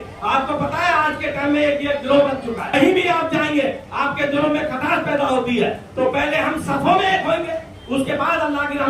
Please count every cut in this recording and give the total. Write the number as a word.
one